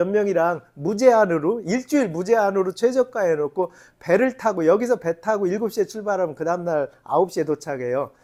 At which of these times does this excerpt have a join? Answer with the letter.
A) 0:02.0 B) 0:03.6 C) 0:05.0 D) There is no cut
D